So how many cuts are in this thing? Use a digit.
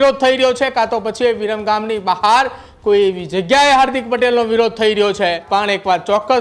1